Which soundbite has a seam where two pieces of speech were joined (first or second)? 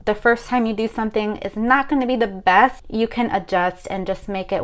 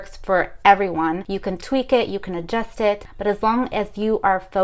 second